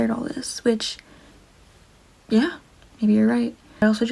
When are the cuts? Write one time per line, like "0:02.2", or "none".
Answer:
none